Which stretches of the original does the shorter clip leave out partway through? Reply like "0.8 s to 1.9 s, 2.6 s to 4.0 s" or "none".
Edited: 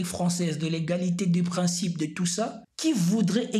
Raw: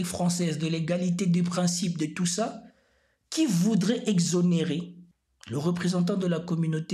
2.6 s to 3.2 s